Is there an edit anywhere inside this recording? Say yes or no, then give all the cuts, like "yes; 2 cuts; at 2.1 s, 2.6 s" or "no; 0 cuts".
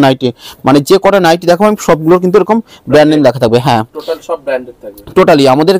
no; 0 cuts